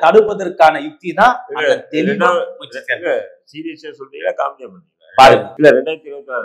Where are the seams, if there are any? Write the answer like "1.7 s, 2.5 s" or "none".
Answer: 5.5 s